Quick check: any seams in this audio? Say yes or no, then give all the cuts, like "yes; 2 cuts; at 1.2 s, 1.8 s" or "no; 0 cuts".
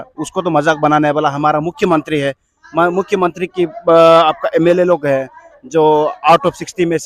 no; 0 cuts